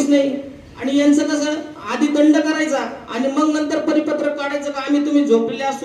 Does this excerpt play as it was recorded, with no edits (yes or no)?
yes